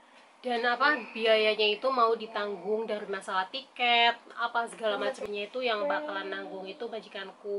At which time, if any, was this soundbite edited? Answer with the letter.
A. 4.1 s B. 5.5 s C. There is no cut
C